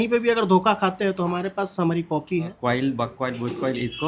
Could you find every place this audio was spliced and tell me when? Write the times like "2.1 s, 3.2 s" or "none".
2.6 s